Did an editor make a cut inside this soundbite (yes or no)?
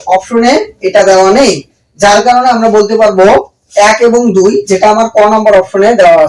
no